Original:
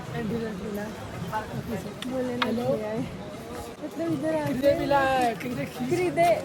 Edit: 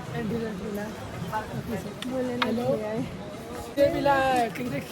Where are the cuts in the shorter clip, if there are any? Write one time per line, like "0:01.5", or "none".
0:03.8

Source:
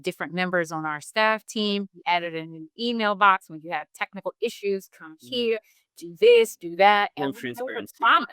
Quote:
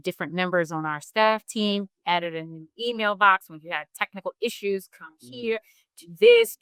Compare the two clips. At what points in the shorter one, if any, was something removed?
none

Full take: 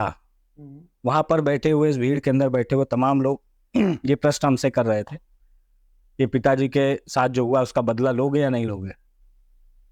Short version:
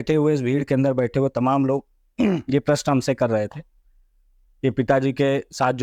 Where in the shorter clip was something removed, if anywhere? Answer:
none

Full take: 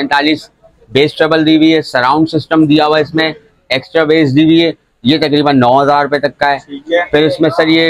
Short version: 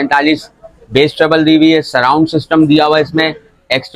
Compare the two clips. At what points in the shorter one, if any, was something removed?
none

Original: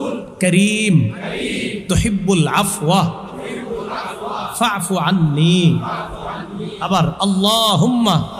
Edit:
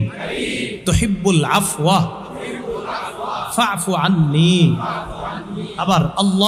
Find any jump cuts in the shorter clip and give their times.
none

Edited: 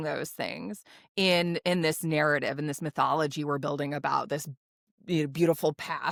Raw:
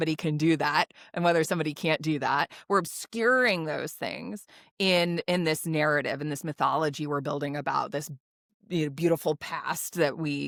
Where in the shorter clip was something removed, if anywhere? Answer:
none

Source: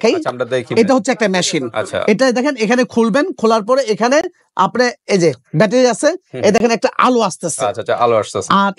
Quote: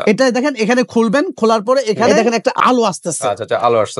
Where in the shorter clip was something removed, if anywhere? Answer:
0:02.1

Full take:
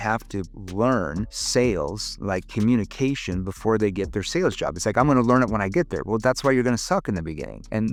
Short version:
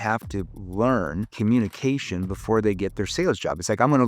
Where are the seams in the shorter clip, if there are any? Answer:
0:01.3

